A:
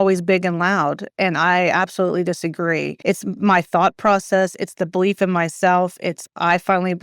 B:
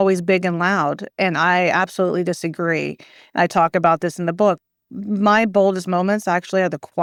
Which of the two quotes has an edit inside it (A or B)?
A